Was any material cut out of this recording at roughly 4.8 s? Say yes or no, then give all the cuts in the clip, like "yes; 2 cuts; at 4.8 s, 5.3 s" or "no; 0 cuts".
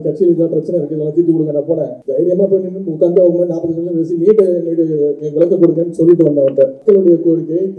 no; 2 cuts; at 2.0 s, 6.8 s